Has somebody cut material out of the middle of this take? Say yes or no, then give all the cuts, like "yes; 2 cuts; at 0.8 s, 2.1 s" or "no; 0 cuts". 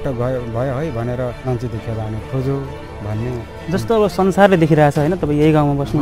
yes; 1 cut; at 1.4 s